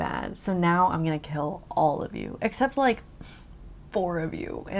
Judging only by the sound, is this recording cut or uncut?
uncut